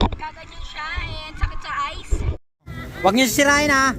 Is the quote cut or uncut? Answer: cut